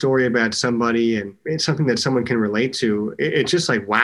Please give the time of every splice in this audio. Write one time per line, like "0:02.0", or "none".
0:01.4